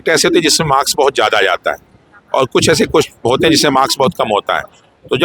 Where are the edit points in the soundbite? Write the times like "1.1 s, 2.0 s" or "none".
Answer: none